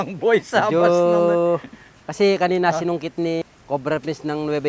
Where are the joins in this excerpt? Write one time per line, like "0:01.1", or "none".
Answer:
0:03.4